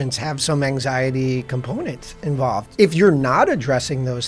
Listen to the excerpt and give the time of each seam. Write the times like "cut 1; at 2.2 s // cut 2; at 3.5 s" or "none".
cut 1; at 2.7 s